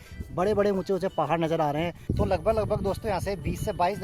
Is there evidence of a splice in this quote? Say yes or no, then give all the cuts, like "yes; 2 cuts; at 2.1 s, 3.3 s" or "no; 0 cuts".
yes; 1 cut; at 2.0 s